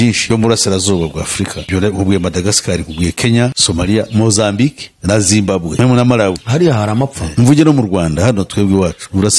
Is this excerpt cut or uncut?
cut